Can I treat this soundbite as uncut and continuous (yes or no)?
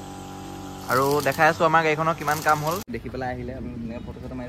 no